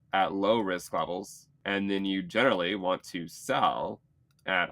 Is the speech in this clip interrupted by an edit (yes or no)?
yes